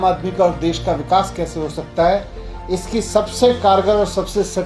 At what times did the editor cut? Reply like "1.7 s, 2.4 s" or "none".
none